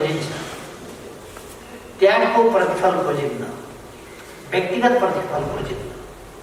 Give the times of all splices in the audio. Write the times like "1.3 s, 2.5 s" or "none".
none